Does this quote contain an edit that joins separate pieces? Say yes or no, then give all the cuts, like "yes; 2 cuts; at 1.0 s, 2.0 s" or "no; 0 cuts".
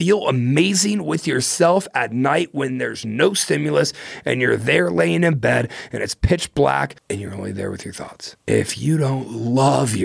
yes; 2 cuts; at 7.0 s, 8.3 s